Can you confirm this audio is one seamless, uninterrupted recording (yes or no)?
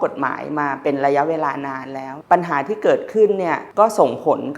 no